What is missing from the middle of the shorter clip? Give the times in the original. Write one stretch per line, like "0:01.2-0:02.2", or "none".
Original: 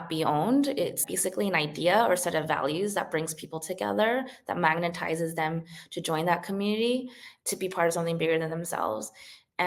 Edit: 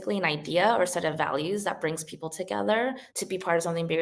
0:04.4-0:07.4

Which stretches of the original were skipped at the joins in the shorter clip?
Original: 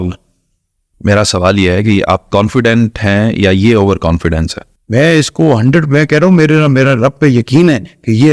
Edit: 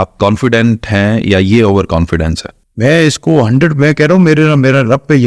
none

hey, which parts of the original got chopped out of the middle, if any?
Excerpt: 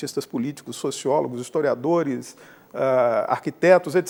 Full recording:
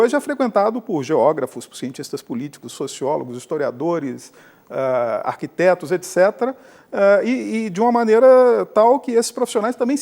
none

